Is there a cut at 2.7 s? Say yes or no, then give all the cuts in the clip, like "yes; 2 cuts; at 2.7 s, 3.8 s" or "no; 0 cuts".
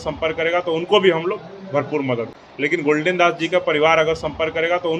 yes; 1 cut; at 2.7 s